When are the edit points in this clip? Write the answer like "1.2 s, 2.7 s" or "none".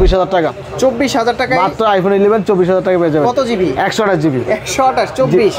none